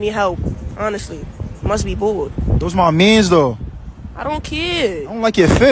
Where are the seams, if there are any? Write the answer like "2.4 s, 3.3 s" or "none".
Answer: 4.1 s